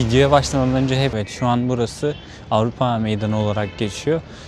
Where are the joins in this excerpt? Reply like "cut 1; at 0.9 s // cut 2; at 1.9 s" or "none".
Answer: cut 1; at 1.2 s